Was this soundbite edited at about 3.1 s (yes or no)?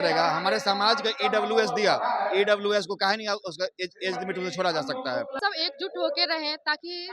no